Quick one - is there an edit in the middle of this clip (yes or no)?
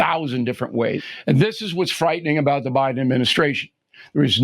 yes